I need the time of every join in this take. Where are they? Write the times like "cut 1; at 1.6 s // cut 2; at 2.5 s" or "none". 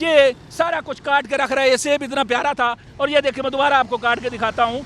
none